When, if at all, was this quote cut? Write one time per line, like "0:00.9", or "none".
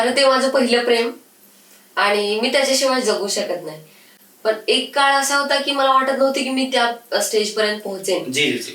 none